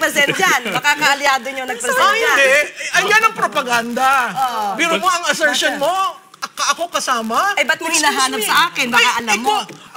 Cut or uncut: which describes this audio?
cut